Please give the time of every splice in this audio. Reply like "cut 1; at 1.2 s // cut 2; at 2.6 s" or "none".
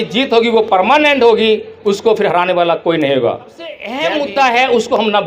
cut 1; at 3.9 s